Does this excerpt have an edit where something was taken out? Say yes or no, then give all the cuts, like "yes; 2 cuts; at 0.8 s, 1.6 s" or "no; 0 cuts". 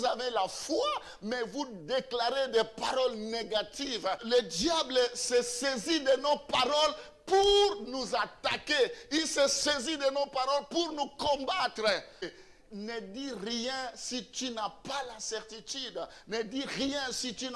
yes; 2 cuts; at 4.2 s, 12.3 s